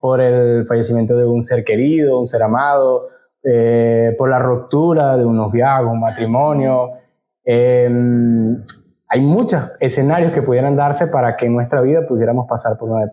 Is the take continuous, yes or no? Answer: yes